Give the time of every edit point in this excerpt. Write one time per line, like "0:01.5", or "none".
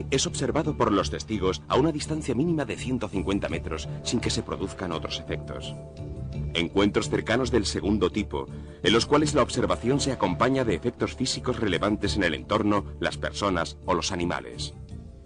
0:06.8